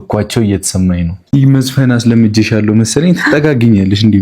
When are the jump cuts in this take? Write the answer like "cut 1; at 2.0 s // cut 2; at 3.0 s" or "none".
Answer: cut 1; at 1.2 s